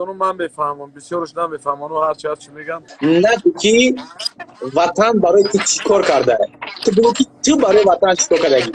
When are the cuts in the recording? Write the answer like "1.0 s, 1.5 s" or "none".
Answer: 2.9 s

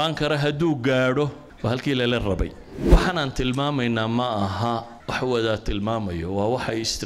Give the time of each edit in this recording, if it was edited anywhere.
2.7 s

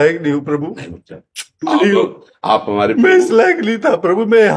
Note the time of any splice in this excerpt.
none

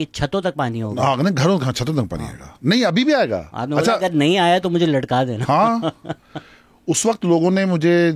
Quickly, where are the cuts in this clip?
none

